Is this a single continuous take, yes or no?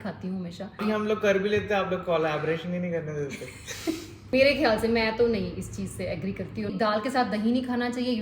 no